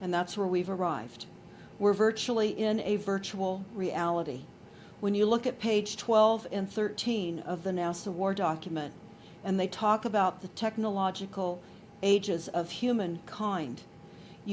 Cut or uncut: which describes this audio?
uncut